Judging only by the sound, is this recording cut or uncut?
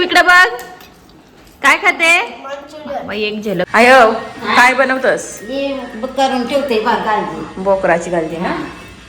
cut